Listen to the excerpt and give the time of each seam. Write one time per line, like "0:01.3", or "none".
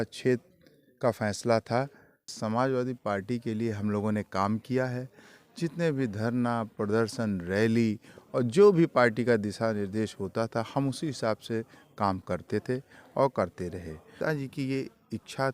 0:02.3
0:14.1